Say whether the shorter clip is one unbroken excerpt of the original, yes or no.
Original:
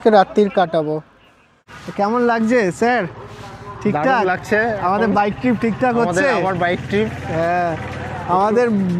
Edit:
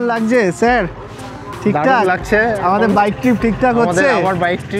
yes